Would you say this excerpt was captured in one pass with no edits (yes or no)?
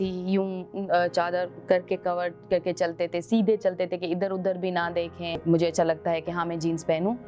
no